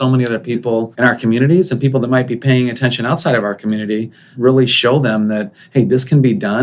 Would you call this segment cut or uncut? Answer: cut